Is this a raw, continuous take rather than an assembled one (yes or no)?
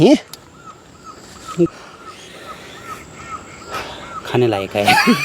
no